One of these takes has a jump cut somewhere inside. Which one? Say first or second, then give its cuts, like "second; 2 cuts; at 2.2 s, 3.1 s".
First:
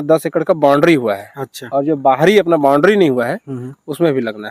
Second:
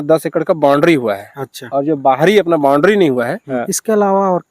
second; 1 cut; at 3.5 s